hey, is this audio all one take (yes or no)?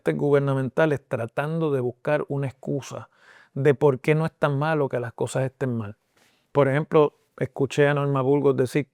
yes